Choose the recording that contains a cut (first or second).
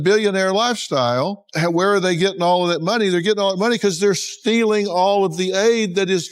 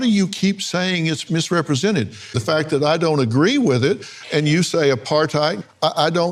first